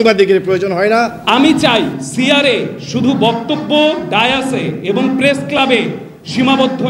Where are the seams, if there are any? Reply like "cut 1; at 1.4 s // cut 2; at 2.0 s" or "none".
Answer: cut 1; at 1.2 s